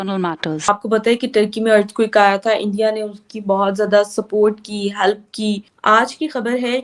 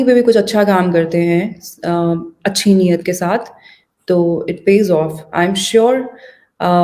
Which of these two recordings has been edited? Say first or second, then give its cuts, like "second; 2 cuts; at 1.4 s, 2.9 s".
first; 2 cuts; at 0.7 s, 5.7 s